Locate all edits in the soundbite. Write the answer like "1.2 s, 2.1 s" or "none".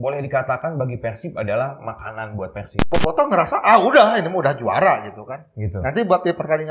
3.0 s